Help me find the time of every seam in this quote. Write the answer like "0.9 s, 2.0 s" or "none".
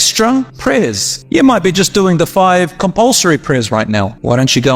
0.9 s